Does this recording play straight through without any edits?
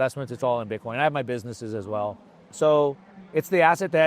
yes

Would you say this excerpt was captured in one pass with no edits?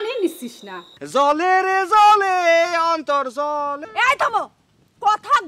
no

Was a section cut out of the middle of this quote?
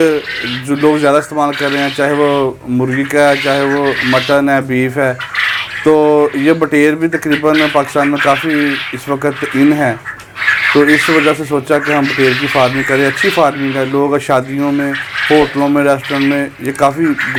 no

